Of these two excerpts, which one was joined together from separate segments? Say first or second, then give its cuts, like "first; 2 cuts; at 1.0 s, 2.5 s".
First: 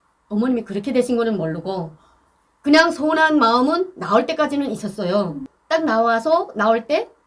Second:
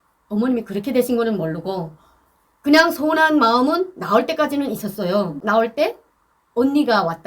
second; 1 cut; at 5.4 s